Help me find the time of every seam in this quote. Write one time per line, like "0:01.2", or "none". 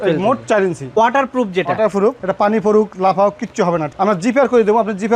0:01.0
0:02.2
0:03.9